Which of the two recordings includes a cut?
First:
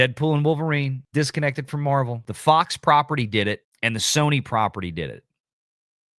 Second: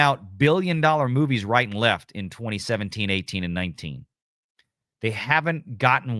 first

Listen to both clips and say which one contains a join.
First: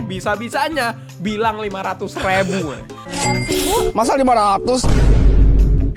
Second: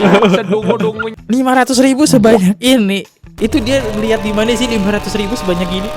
second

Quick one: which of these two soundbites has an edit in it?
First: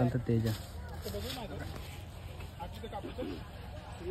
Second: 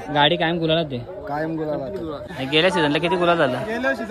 second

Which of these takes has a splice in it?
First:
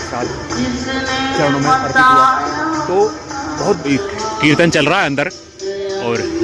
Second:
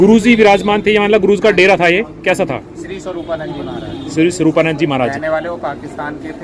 first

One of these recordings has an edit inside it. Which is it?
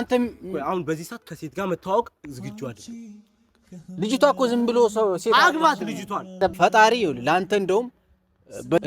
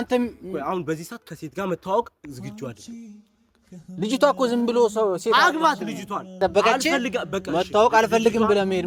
first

